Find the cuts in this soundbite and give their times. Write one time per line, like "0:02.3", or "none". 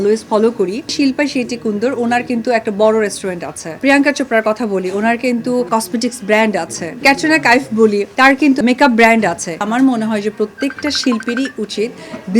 0:00.9
0:03.8
0:05.7
0:07.0
0:08.4
0:09.6